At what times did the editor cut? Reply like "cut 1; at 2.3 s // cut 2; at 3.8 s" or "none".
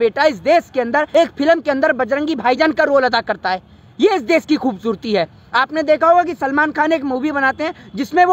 cut 1; at 1.1 s

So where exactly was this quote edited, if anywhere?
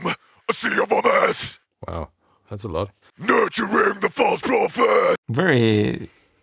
cut 1; at 3.1 s

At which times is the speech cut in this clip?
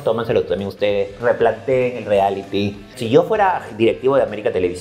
cut 1; at 3.0 s

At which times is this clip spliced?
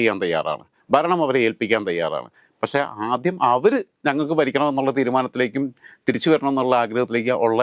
none

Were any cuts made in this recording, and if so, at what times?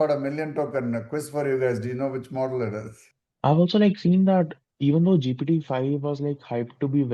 cut 1; at 3.2 s

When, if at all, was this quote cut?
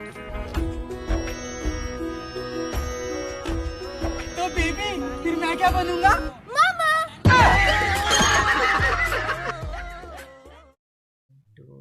cut 1; at 10.8 s

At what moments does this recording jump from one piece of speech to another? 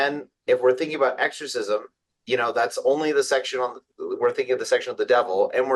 none

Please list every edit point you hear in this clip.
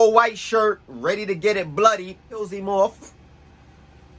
cut 1; at 2.5 s

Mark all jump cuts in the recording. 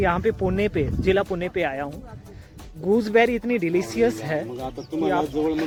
none

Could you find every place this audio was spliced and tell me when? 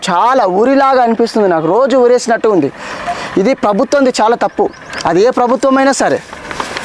none

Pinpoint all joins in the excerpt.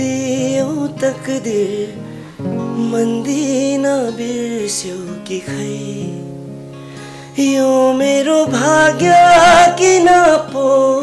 none

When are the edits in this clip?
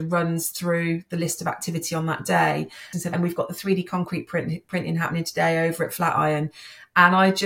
cut 1; at 2.9 s

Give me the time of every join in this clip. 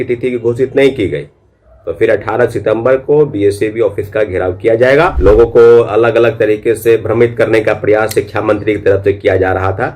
cut 1; at 5.1 s

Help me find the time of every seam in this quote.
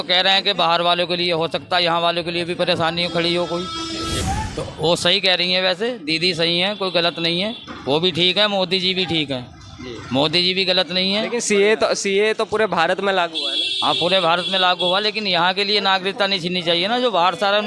cut 1; at 4.2 s

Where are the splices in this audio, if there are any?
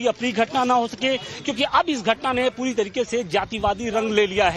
none

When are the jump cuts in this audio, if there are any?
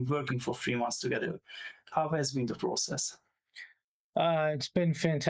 none

